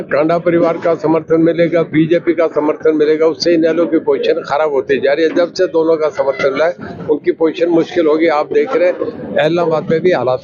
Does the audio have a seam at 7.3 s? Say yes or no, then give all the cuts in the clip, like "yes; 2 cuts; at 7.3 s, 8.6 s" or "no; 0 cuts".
no; 0 cuts